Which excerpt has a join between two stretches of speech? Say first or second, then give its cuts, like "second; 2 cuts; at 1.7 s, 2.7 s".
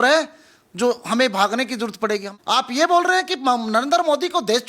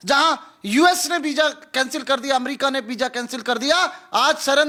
first; 1 cut; at 2.3 s